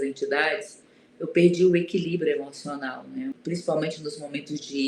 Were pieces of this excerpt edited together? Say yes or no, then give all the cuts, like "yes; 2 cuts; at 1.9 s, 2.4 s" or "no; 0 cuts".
yes; 1 cut; at 3.4 s